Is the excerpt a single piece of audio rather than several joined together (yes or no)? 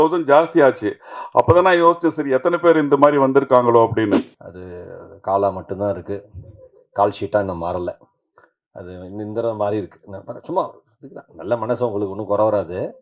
no